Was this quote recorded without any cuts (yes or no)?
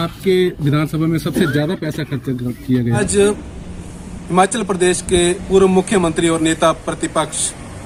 yes